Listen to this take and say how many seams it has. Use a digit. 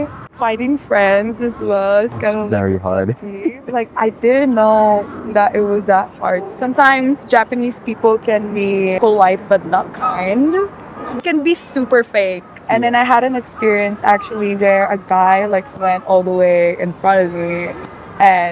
4